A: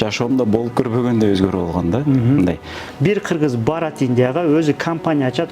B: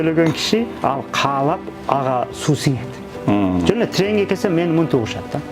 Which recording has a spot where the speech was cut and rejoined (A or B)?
A